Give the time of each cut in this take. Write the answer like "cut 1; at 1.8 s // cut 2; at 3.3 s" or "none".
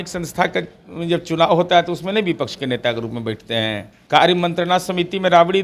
cut 1; at 3.9 s